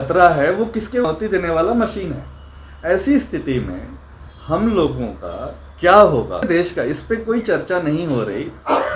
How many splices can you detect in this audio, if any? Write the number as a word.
two